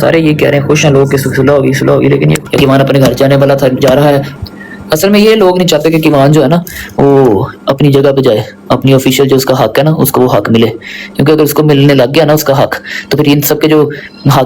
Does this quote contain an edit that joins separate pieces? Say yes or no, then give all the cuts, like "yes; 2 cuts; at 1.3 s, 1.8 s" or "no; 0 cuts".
yes; 2 cuts; at 2.4 s, 4.3 s